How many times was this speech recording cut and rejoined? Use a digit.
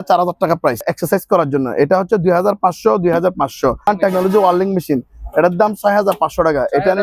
2